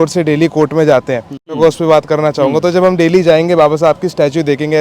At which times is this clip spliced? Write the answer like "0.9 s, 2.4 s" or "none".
1.5 s